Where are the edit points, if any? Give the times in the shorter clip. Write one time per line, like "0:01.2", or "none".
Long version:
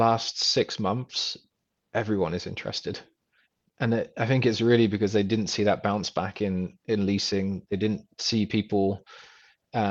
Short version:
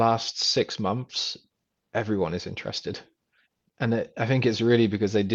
none